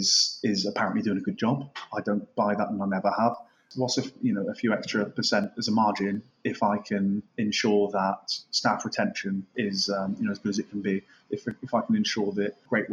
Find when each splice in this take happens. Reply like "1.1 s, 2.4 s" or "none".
3.6 s